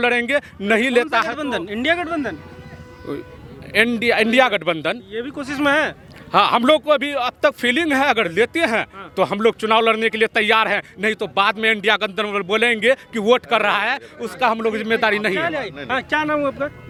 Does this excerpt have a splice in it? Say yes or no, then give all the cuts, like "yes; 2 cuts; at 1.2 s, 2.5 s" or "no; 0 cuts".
no; 0 cuts